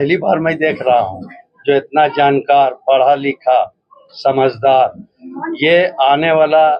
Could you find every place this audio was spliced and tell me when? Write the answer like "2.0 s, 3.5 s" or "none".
none